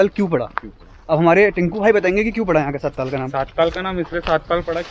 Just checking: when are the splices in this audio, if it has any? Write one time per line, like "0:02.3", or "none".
none